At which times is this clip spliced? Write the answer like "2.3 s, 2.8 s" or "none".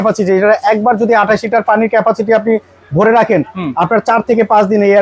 none

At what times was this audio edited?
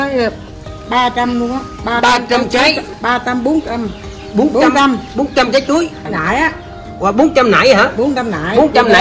6.2 s

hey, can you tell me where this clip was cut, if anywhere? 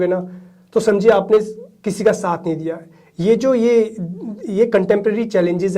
none

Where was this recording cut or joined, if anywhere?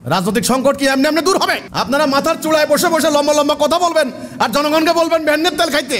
1.6 s

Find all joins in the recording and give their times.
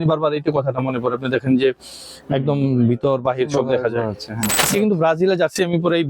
4.6 s

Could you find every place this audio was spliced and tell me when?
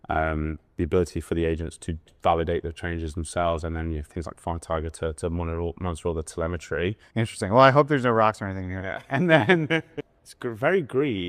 7.0 s, 10.0 s

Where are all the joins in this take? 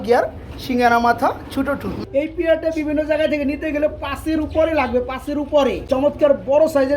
1.9 s, 5.9 s

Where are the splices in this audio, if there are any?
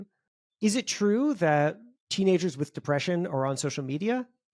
none

